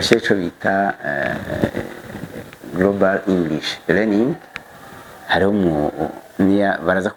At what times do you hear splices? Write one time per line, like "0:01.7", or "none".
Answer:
none

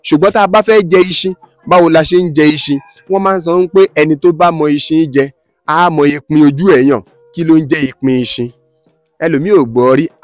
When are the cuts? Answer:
none

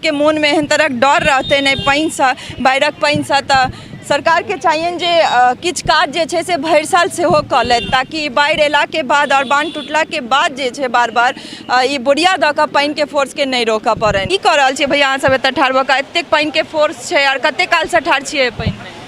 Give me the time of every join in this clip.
0:14.3

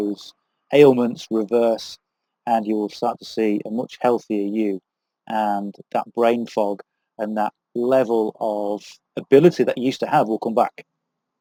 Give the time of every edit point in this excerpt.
none

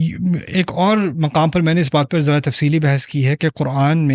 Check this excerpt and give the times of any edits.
none

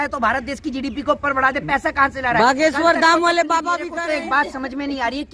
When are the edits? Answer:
0:03.9

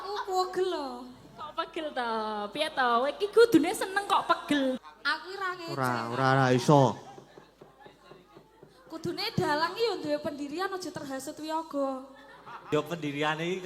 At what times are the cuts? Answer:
0:04.8
0:12.7

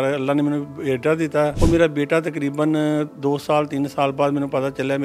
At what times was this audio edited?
0:01.6

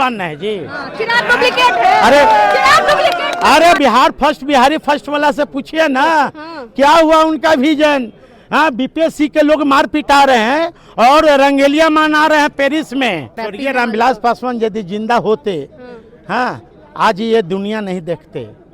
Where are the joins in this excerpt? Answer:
0:03.8
0:13.4

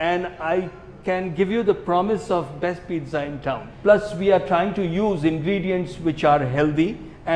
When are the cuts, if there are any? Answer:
0:03.6

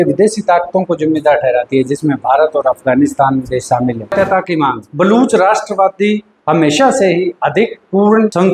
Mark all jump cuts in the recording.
0:04.1

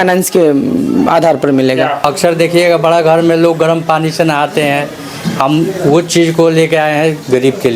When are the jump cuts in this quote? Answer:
0:02.0

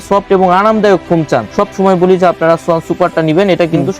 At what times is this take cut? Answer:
0:01.5

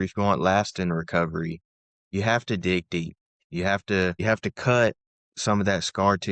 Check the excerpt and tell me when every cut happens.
0:04.2

